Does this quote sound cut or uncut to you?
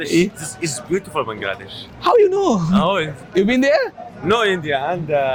uncut